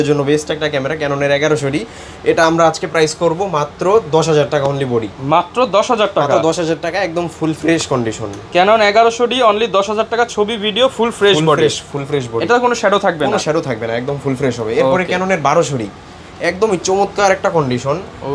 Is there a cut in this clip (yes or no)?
no